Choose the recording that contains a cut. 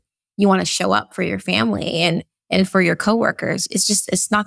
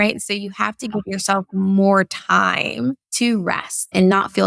second; 1 cut; at 3.1 s

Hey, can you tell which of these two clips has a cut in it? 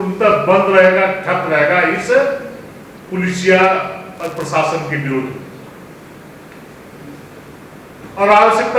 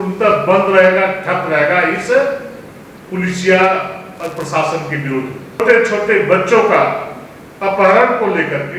second; 1 cut; at 5.6 s

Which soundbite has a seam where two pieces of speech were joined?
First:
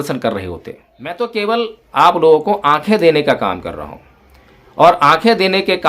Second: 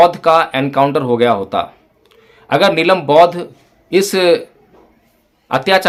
first; 1 cut; at 1.1 s

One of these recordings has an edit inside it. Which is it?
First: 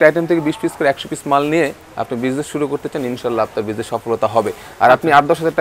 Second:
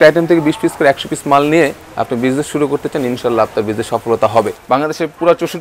second; 1 cut; at 4.6 s

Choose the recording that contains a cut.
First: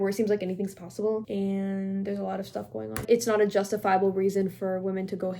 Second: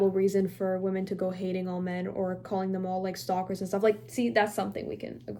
first; 2 cuts; at 1.3 s, 3.0 s

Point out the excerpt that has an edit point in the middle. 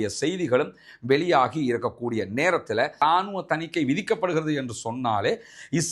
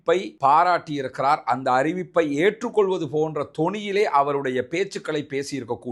first; 1 cut; at 3.0 s

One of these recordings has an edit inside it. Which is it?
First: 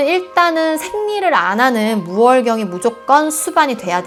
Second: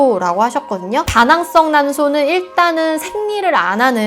second; 1 cut; at 1.1 s

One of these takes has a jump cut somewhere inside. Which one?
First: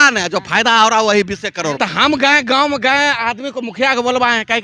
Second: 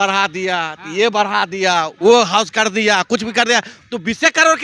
first; 1 cut; at 1.8 s

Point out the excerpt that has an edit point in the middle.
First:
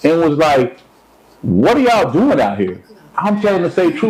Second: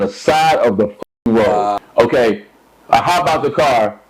second; 1 cut; at 1.8 s

